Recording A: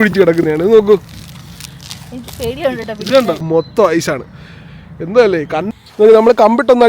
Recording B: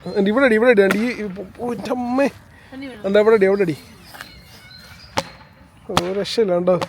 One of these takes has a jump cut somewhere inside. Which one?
A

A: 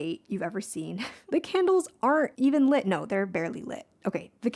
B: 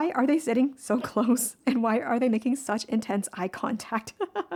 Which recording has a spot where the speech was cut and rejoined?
A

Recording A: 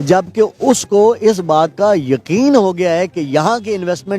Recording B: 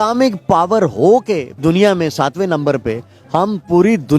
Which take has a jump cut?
B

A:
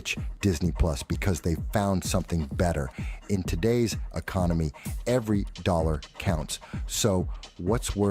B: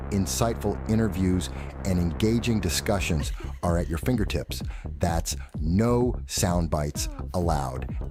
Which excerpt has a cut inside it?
A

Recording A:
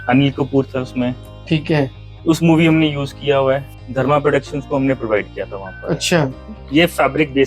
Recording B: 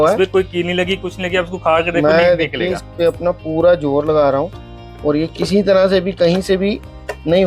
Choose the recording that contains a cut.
A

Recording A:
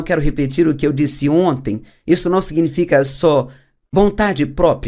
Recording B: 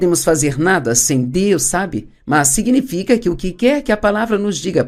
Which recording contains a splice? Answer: A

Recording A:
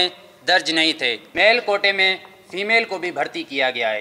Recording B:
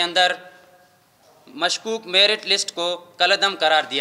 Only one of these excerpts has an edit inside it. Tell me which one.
A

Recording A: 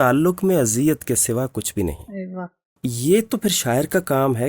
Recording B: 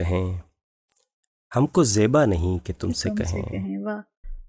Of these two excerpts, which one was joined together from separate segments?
A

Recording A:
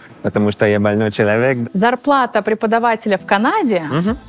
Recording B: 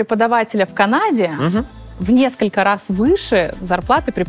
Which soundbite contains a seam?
A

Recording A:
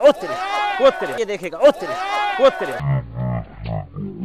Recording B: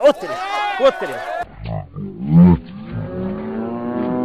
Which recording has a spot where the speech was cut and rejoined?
B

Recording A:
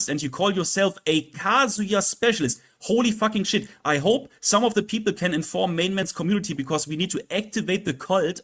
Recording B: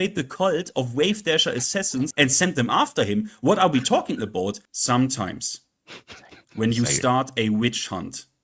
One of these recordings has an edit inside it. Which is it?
B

